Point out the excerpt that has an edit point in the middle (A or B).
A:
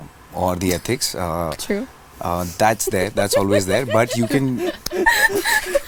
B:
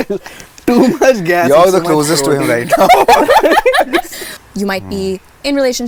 B